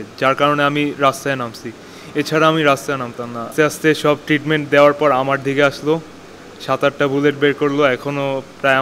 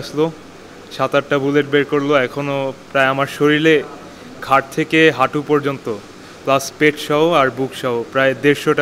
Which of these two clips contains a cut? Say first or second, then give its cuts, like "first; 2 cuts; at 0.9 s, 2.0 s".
first; 1 cut; at 3.5 s